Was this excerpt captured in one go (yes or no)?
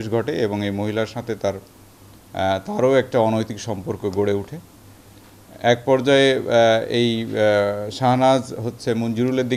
yes